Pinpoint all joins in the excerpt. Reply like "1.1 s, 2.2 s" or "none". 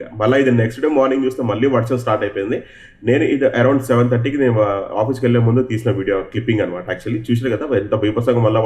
none